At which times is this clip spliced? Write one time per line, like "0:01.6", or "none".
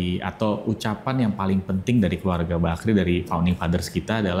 none

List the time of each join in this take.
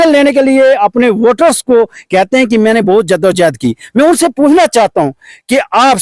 none

